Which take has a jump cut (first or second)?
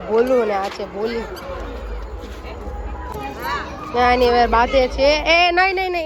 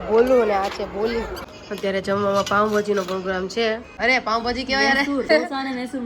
second